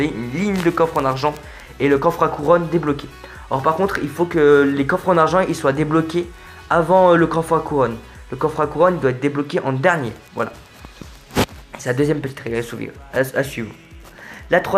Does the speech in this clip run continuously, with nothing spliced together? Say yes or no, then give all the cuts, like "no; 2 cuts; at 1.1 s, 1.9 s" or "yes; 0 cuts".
yes; 0 cuts